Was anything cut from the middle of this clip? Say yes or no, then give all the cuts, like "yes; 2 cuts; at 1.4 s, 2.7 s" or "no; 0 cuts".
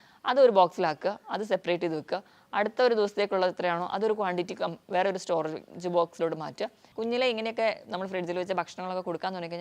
yes; 1 cut; at 6.8 s